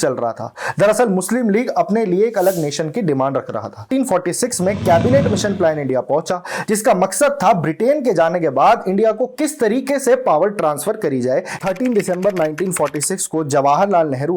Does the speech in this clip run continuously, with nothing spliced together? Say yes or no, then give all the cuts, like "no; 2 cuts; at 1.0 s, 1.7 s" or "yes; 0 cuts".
no; 2 cuts; at 3.9 s, 11.5 s